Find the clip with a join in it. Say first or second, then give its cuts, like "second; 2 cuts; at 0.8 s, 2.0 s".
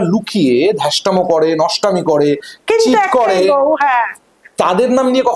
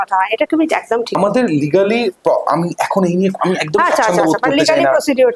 second; 1 cut; at 1.2 s